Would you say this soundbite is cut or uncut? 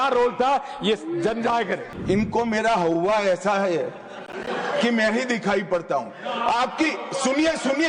cut